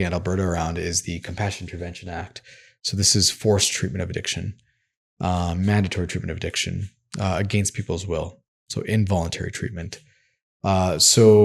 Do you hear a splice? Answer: no; 0 cuts

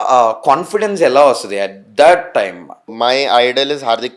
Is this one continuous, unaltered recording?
no; 1 cut; at 2.9 s

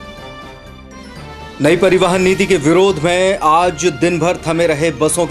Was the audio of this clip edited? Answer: no; 0 cuts

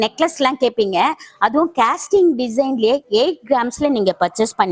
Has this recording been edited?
no; 0 cuts

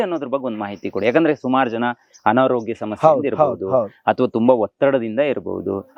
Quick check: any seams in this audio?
no; 0 cuts

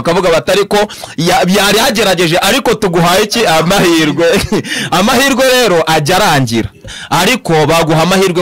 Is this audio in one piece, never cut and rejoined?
no; 1 cut; at 7.0 s

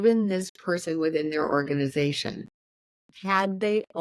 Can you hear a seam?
no; 0 cuts

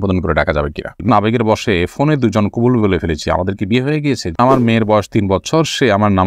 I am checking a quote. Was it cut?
yes; 2 cuts; at 1.1 s, 4.4 s

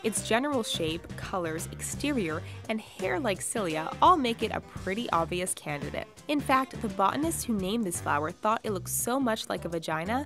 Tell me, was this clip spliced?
no; 0 cuts

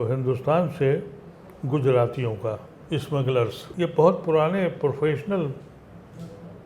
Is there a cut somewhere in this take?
yes; 1 cut; at 3.6 s

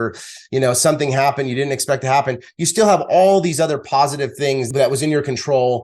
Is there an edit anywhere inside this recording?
yes; 1 cut; at 4.7 s

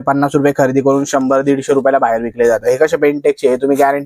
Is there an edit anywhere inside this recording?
no; 0 cuts

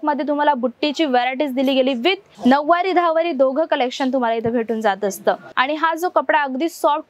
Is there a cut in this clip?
yes; 2 cuts; at 2.3 s, 5.5 s

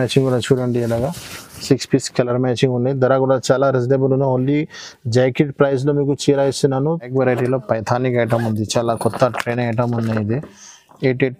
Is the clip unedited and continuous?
no; 1 cut; at 7.1 s

